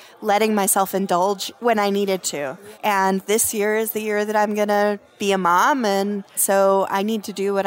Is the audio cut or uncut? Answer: cut